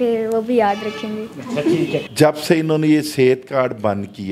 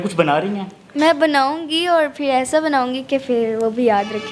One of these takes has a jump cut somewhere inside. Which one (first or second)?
first